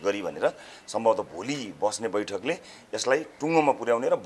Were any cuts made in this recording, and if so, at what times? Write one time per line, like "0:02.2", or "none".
none